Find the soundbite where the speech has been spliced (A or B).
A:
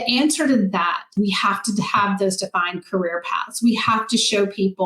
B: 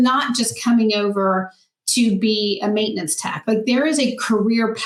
A